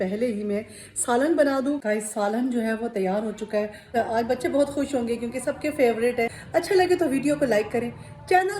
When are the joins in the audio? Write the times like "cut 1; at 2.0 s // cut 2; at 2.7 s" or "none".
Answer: cut 1; at 1.8 s // cut 2; at 3.8 s // cut 3; at 6.4 s